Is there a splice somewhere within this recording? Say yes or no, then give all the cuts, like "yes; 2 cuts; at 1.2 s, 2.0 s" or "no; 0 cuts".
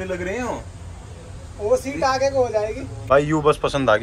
yes; 1 cut; at 2.9 s